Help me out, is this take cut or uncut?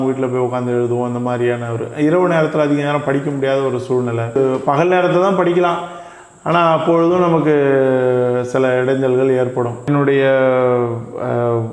cut